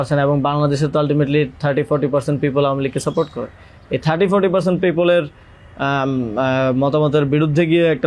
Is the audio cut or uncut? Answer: uncut